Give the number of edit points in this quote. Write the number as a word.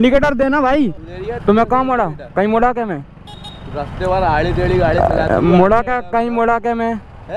one